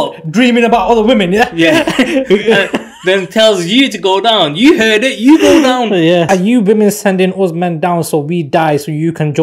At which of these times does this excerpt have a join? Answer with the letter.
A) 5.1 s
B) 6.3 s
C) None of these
B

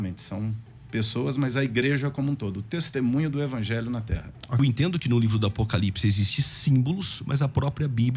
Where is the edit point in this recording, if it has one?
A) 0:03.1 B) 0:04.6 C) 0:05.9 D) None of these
B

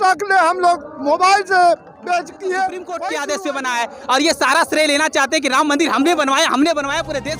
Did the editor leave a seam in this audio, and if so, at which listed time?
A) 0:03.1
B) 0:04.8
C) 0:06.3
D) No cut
A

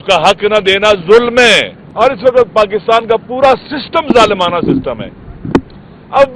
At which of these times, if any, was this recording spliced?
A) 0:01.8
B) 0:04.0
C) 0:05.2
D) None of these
A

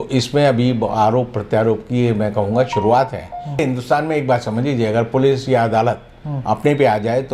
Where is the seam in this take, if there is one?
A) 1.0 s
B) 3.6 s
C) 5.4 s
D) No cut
B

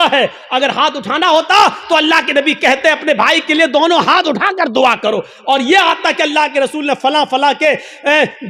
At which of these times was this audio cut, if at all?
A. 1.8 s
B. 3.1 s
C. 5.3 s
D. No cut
D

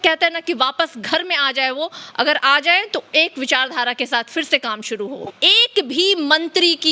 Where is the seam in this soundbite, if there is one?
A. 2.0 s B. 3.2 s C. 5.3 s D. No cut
C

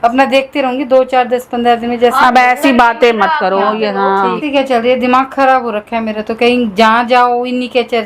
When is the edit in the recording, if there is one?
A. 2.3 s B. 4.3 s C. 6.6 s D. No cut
B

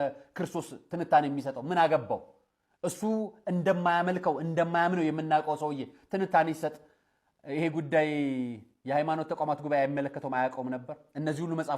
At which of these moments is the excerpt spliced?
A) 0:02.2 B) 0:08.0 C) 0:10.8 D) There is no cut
D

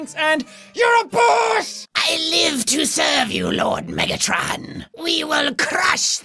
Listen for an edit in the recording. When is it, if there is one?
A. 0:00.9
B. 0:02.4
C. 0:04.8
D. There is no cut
D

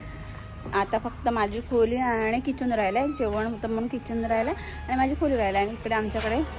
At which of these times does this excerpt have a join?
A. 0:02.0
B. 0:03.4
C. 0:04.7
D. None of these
D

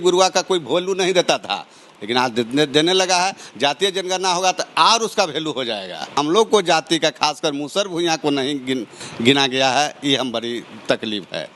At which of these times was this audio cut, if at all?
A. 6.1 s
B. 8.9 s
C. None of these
A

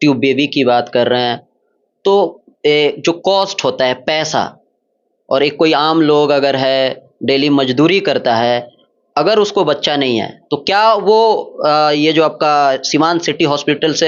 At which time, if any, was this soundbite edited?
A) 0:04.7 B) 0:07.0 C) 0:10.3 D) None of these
D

